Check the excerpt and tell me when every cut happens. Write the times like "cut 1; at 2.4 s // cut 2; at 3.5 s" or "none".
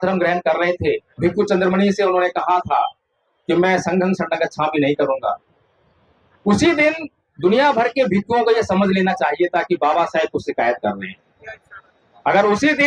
cut 1; at 1.1 s

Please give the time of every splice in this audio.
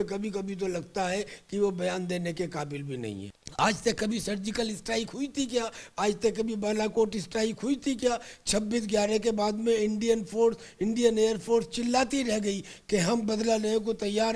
cut 1; at 3.4 s

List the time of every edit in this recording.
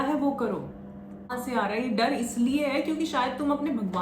cut 1; at 1.3 s

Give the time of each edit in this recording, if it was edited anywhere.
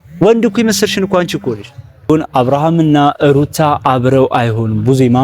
none

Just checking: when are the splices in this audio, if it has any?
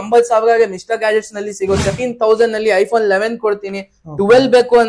cut 1; at 2.0 s

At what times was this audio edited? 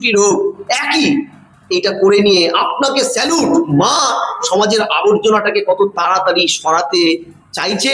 cut 1; at 3.7 s

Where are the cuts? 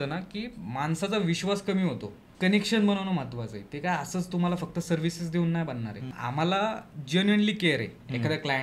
cut 1; at 2.3 s // cut 2; at 6.1 s

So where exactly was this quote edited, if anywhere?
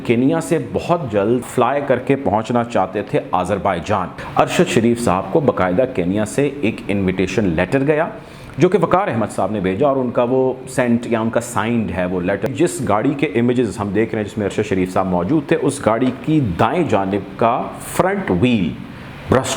cut 1; at 1.4 s // cut 2; at 4.2 s // cut 3; at 12.5 s

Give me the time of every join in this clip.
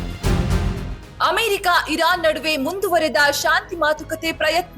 none

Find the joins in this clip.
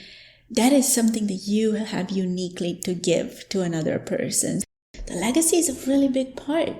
cut 1; at 4.6 s

